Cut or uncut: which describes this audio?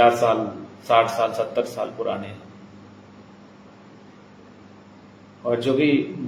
uncut